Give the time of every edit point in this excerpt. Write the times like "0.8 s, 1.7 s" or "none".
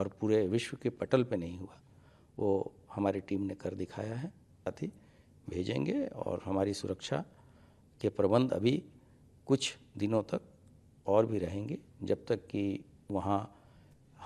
4.7 s